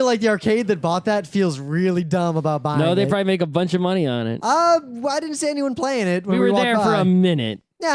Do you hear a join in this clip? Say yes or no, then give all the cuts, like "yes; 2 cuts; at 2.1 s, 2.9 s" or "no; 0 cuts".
no; 0 cuts